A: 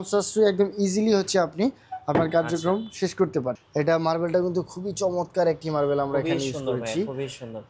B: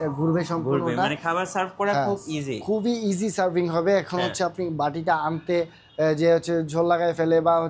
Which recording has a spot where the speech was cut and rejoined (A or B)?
A